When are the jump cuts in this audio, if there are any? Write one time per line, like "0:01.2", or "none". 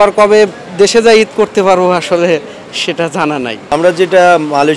none

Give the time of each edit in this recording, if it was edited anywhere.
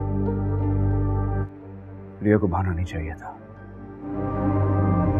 0:01.2

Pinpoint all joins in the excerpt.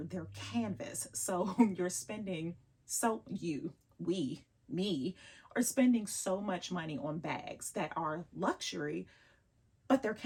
none

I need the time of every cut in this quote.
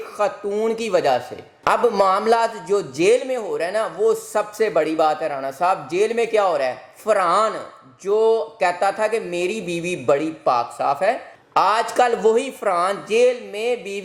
none

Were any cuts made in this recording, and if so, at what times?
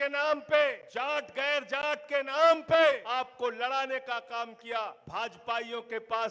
0:00.8
0:03.0
0:05.0

